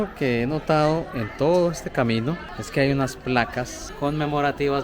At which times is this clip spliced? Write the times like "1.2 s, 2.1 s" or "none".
2.5 s, 3.8 s